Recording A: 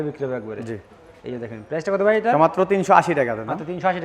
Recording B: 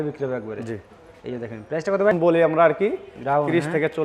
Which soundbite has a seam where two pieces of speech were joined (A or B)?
B